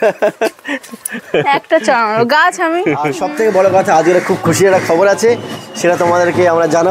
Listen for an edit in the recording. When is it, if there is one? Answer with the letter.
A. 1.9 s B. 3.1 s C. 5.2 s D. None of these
B